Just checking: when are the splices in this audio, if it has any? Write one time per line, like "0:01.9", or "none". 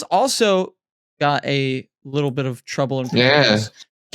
none

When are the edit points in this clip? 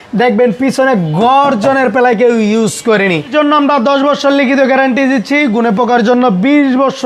0:03.3

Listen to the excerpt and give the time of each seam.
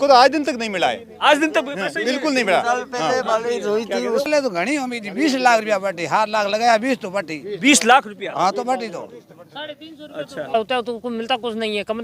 0:04.3
0:10.5

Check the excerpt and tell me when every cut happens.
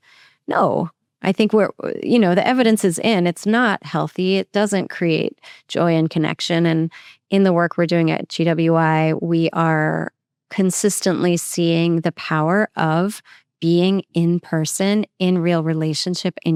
none

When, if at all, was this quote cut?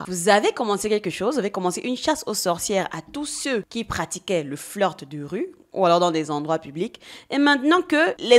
none

